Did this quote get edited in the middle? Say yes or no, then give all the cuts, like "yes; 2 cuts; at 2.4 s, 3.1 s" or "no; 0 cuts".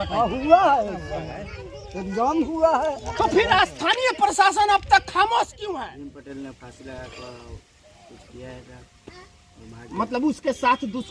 yes; 1 cut; at 5.6 s